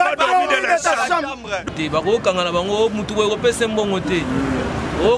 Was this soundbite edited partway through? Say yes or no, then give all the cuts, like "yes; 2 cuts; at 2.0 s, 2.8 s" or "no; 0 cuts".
yes; 1 cut; at 1.7 s